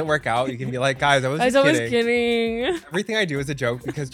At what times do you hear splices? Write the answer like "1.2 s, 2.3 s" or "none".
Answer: 2.9 s